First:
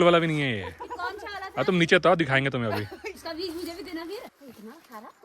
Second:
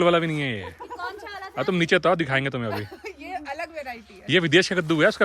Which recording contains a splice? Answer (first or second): first